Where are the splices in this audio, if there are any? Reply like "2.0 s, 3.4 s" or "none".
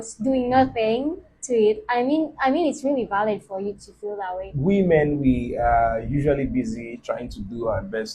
4.5 s